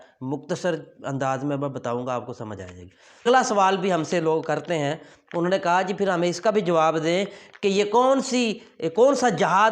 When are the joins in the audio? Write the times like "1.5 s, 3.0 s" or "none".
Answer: 3.3 s